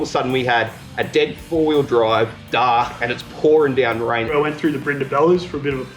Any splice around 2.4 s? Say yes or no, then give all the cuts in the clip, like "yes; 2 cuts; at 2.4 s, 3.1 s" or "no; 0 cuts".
yes; 2 cuts; at 2.4 s, 4.3 s